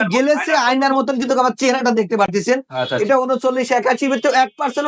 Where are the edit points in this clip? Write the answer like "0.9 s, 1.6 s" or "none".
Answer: none